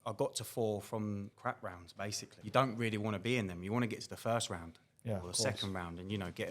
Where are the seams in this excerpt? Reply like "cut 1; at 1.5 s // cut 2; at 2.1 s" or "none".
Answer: cut 1; at 1.3 s // cut 2; at 2.3 s